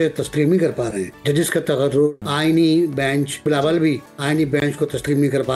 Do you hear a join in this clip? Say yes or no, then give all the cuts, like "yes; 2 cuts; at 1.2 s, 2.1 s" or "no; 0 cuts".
yes; 4 cuts; at 1.1 s, 2.2 s, 3.4 s, 4.1 s